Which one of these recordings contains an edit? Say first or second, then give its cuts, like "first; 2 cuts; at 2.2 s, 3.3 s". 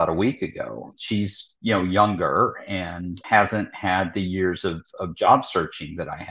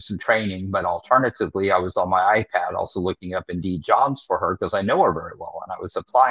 first; 2 cuts; at 0.9 s, 3.2 s